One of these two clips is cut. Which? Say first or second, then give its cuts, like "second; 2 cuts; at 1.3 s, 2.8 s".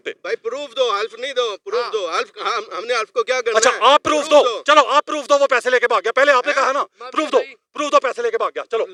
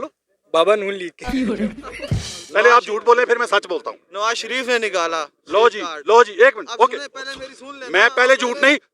second; 2 cuts; at 1.2 s, 1.9 s